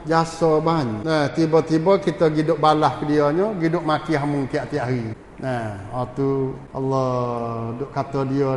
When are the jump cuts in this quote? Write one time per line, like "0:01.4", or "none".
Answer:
0:01.0
0:05.2
0:06.6